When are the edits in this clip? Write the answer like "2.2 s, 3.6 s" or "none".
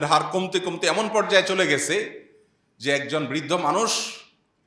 none